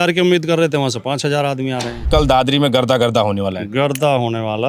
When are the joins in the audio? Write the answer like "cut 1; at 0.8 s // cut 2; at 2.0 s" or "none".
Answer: cut 1; at 2.0 s